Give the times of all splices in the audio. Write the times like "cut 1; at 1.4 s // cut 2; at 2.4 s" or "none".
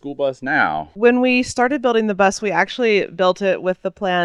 cut 1; at 0.9 s